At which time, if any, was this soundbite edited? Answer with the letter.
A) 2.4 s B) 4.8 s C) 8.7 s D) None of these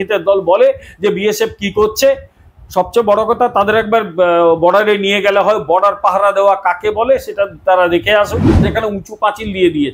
C